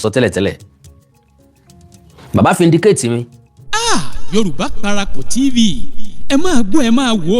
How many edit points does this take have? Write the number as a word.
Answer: one